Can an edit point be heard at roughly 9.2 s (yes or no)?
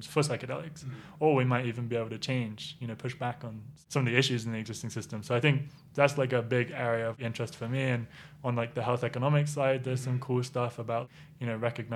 no